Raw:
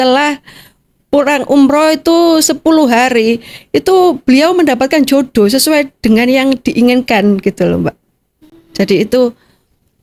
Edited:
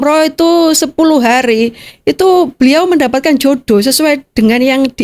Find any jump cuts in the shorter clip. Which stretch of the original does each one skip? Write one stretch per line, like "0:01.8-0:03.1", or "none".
none